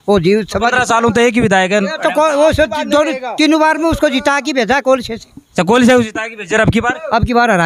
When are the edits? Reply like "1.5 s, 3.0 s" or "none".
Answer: none